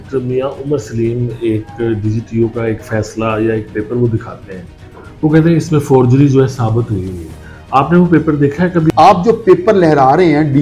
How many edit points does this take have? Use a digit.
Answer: 1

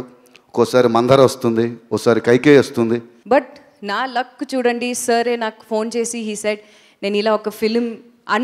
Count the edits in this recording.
1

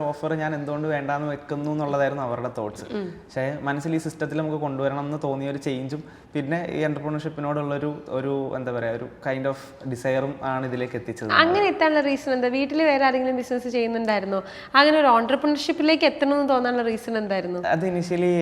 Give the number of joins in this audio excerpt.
0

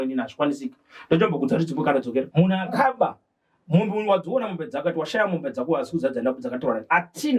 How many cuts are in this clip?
1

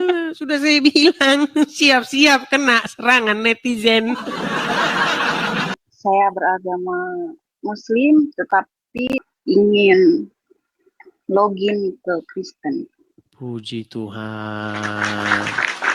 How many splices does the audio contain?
2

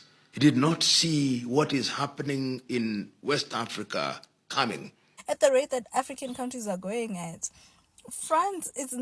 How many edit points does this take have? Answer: 1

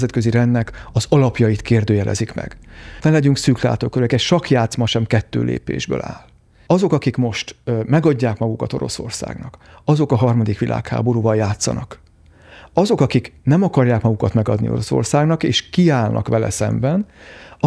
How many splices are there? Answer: 0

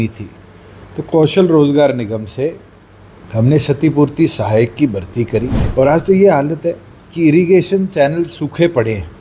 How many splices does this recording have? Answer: 1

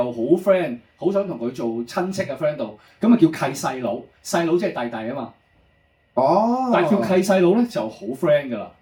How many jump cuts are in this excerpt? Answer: 0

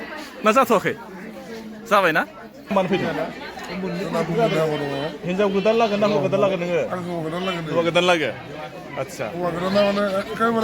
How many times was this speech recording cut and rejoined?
1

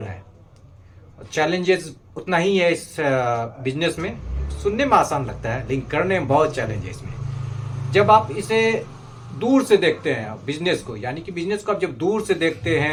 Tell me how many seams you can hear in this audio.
0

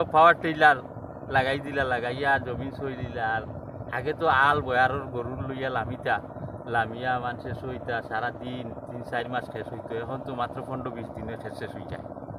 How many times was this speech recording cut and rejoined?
0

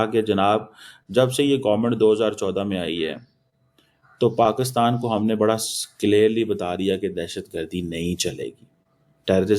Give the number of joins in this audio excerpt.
0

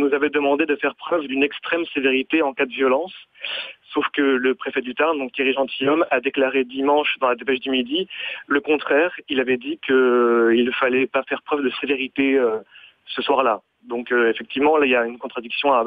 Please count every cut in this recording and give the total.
0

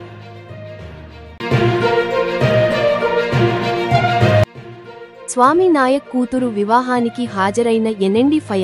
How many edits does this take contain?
0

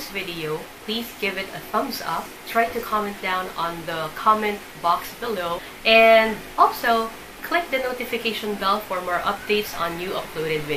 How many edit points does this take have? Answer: 2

